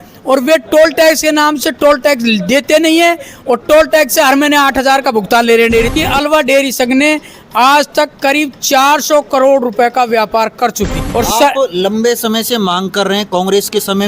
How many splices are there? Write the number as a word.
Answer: two